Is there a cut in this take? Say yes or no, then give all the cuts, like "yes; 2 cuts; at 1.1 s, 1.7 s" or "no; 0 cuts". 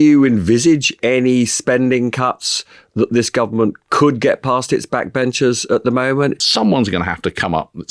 yes; 1 cut; at 6.4 s